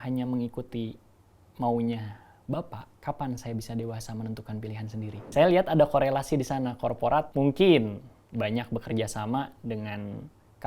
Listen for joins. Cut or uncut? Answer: cut